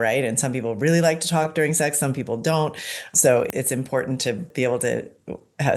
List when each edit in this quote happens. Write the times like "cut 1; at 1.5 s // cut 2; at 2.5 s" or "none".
cut 1; at 4.5 s

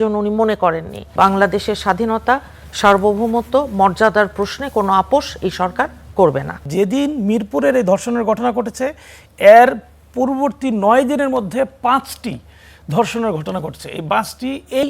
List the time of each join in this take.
cut 1; at 1.1 s // cut 2; at 6.6 s

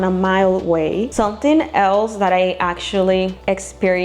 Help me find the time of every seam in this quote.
cut 1; at 1.1 s

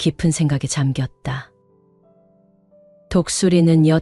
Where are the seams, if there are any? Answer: none

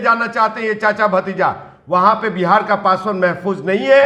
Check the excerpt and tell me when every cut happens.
none

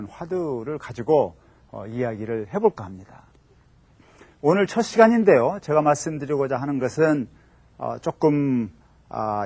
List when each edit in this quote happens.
cut 1; at 6.9 s

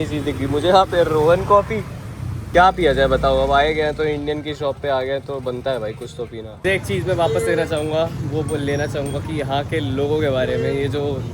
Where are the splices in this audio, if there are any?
cut 1; at 2.3 s // cut 2; at 6.5 s

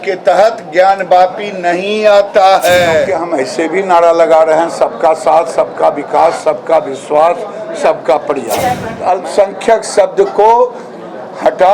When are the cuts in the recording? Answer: cut 1; at 3.2 s // cut 2; at 8.9 s

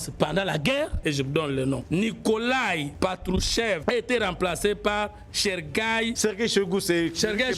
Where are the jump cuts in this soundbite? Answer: cut 1; at 1.0 s // cut 2; at 1.8 s // cut 3; at 2.9 s // cut 4; at 3.8 s // cut 5; at 6.1 s

